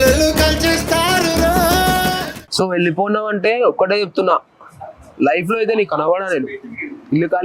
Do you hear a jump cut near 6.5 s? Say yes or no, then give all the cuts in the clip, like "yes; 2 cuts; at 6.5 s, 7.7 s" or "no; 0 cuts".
no; 1 cut; at 2.4 s